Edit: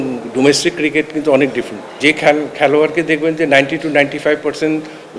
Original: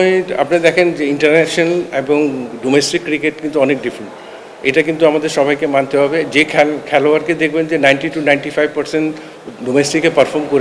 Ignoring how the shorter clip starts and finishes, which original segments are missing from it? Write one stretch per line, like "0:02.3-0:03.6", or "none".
0:04.2-0:06.3

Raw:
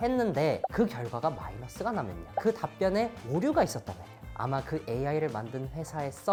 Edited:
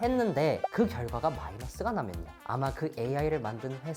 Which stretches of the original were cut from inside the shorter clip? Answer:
0:02.2-0:04.1

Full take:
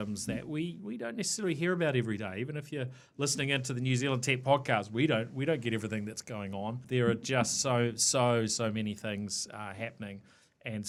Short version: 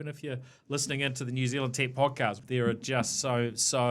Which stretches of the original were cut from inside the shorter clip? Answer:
0:04.9-0:06.8

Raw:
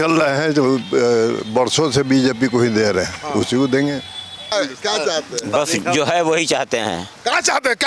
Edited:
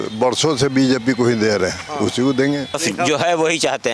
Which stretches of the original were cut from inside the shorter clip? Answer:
0:04.1-0:05.7

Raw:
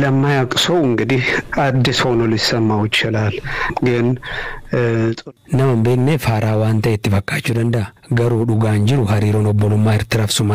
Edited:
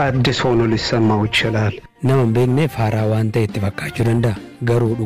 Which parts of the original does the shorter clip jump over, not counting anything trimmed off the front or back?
0:03.4-0:05.3

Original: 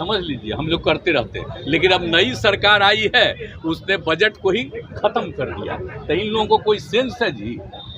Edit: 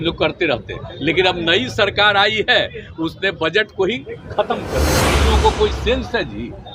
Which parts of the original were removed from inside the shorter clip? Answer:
0:05.8-0:06.3

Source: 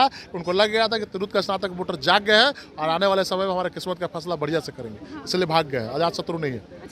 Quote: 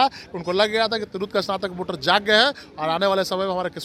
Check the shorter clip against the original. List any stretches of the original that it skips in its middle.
none

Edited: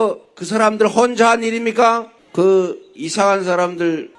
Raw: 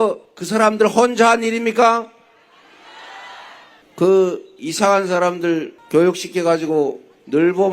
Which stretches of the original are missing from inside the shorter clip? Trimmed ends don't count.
0:02.2-0:03.8

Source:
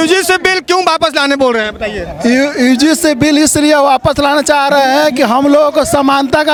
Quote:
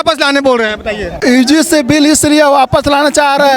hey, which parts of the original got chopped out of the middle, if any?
0:02.2-0:02.5

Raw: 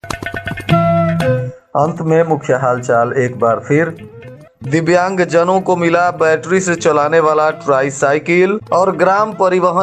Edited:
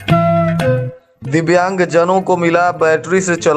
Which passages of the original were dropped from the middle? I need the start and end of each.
0:01.6-0:04.3

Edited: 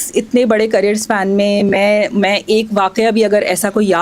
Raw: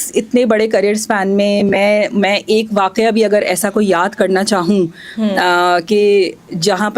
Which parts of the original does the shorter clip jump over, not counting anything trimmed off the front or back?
none

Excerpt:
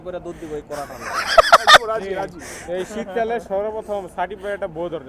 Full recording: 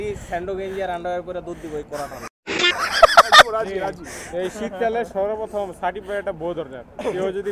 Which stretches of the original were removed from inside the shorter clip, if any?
0:02.3-0:02.7

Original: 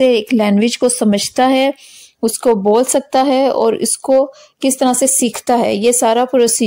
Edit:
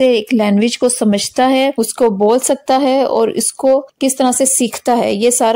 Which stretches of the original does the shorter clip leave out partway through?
0:01.7-0:02.2
0:04.4-0:04.5

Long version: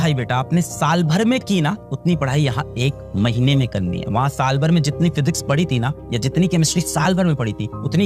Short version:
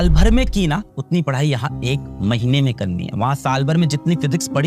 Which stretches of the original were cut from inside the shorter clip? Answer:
none

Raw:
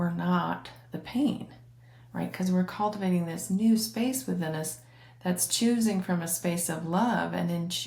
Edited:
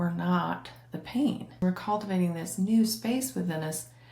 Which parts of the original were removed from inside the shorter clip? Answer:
0:01.6-0:02.5

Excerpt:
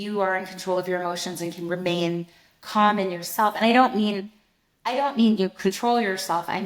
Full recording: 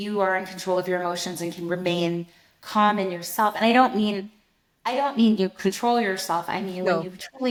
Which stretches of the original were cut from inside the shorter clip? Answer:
none

